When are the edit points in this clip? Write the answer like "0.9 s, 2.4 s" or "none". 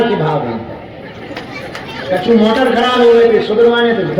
none